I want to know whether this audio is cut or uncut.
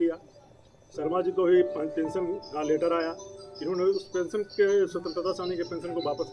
uncut